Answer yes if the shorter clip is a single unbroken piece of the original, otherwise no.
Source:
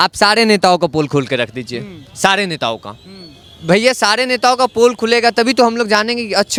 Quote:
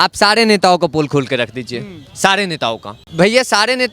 no